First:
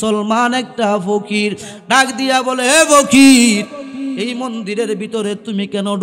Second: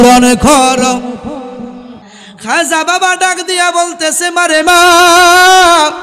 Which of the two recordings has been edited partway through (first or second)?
second